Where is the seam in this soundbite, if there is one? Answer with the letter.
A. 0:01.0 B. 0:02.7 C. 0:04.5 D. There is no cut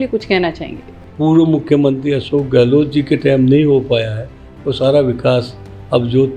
A